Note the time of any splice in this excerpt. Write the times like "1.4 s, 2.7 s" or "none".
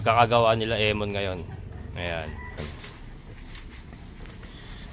2.6 s